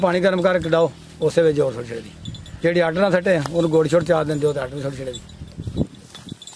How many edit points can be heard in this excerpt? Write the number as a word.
zero